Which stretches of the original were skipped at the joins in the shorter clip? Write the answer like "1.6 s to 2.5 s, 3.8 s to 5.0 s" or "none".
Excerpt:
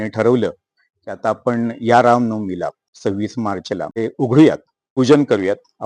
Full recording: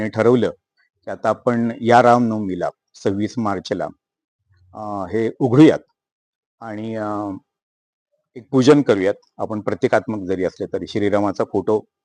4.0 s to 5.2 s, 6.0 s to 8.3 s